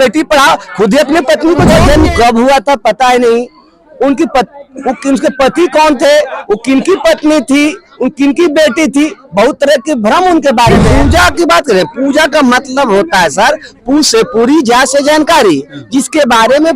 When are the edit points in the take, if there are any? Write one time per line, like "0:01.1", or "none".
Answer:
0:01.7
0:10.8